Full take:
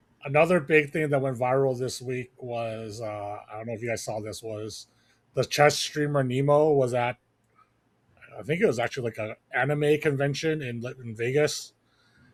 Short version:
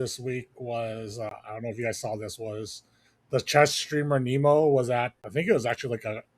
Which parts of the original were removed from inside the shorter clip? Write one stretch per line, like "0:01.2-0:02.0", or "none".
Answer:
0:03.1-0:03.4
0:07.2-0:08.3